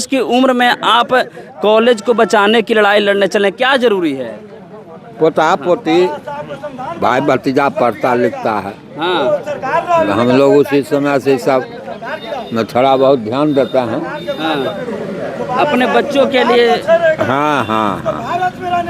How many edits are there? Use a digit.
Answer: 0